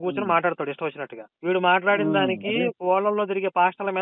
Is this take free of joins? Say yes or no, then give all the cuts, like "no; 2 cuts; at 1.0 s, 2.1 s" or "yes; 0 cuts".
yes; 0 cuts